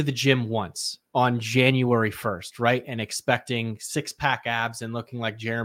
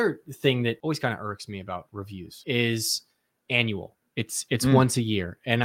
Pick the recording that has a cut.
second; 2 cuts; at 0.8 s, 2.4 s

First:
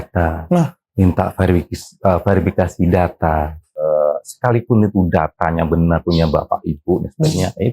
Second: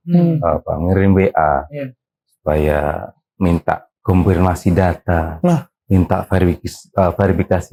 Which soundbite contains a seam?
first; 1 cut; at 3.8 s

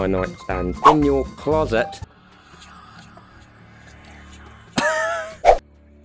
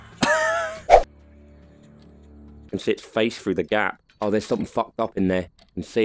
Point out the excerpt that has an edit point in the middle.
second; 1 cut; at 2.5 s

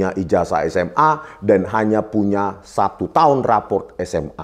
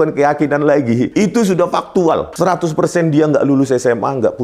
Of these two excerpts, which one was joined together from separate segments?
second; 2 cuts; at 1.1 s, 2.3 s

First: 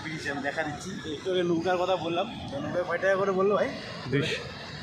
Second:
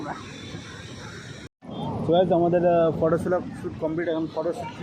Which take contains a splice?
second; 1 cut; at 1.5 s

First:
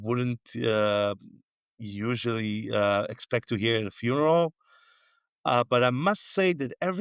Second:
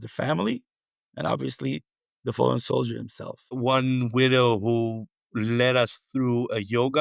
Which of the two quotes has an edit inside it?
second; 1 cut; at 3.4 s

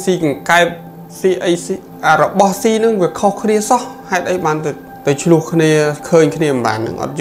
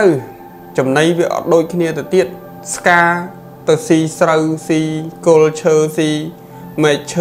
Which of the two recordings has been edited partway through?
first; 2 cuts; at 1.9 s, 4.9 s

